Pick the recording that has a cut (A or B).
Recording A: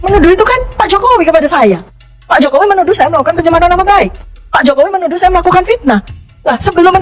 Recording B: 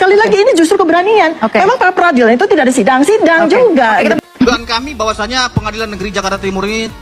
B